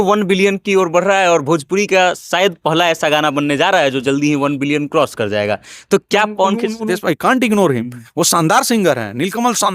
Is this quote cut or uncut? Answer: cut